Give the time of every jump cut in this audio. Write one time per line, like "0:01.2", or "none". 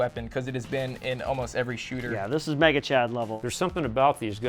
0:03.3